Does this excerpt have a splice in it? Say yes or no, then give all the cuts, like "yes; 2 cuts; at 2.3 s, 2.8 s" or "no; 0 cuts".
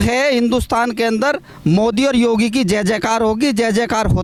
no; 0 cuts